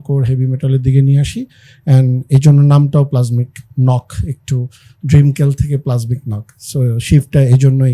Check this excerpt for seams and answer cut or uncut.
uncut